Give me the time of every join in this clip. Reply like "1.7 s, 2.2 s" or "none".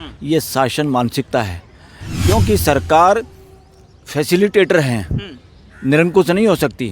none